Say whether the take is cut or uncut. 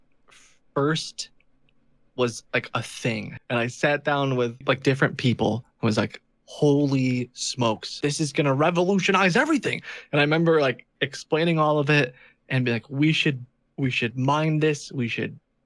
cut